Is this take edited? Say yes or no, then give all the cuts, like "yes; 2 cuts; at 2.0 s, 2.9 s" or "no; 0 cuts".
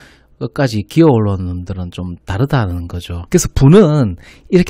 yes; 1 cut; at 3.2 s